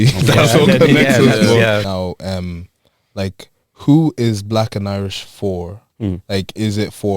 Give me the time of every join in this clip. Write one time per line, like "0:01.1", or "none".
0:01.8